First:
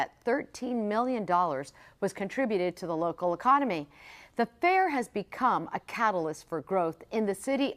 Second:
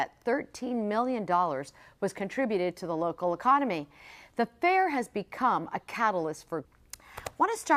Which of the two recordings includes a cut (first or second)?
first